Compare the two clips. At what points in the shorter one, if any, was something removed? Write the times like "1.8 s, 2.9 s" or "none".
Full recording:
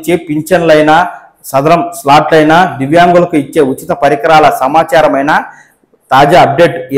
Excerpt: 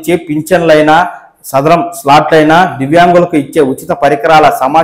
none